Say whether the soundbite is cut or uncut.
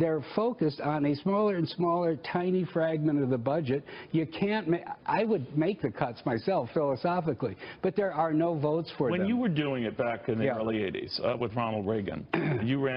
cut